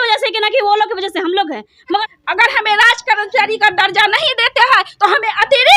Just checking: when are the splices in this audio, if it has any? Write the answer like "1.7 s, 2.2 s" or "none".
2.1 s